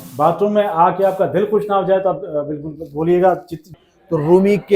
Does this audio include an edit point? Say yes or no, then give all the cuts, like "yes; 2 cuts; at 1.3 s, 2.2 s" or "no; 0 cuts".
yes; 1 cut; at 3.7 s